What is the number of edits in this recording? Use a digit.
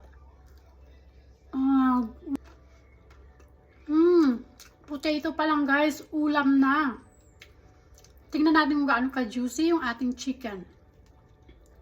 1